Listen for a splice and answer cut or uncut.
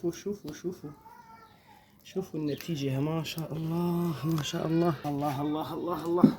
cut